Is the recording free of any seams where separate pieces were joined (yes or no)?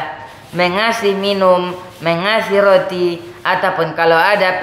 yes